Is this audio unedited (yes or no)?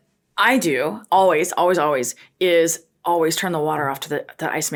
yes